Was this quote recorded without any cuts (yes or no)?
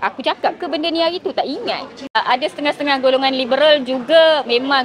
no